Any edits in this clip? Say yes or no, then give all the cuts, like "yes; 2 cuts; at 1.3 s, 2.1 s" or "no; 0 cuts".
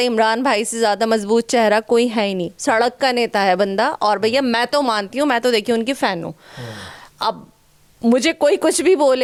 no; 0 cuts